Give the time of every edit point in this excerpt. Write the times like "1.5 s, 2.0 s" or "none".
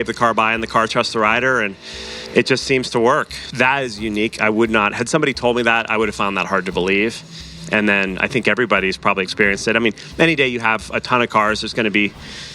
3.4 s